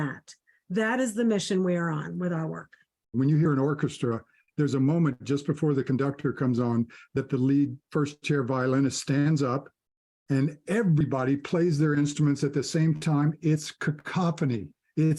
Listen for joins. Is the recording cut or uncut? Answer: cut